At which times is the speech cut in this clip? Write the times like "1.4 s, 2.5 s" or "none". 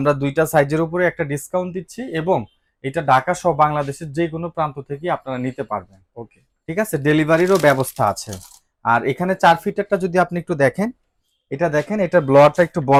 none